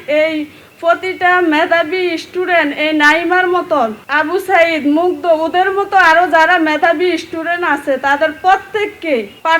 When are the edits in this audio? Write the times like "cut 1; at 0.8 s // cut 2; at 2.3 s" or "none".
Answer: none